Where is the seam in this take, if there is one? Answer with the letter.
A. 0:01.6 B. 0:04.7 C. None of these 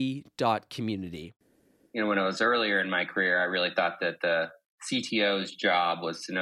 A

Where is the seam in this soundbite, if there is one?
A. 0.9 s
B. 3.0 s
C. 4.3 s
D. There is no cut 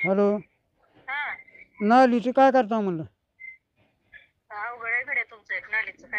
D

